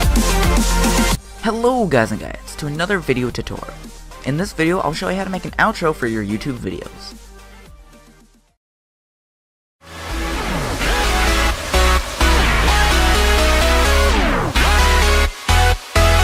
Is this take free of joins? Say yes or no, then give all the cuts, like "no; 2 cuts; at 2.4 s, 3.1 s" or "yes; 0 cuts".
yes; 0 cuts